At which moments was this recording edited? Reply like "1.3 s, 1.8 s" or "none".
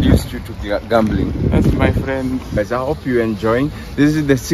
2.6 s